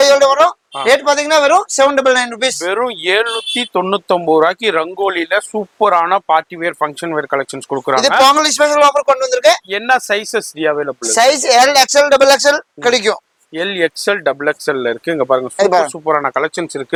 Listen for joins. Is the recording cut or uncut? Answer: uncut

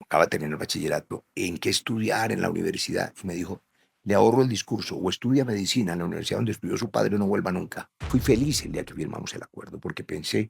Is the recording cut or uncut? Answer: cut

